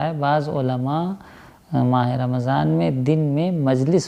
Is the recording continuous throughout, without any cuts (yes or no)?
yes